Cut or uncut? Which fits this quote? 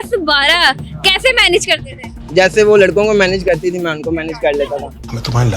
cut